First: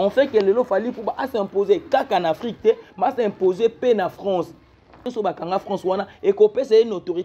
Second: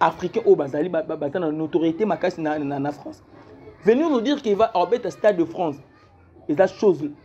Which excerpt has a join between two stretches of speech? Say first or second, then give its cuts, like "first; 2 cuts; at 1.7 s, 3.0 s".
first; 1 cut; at 5.0 s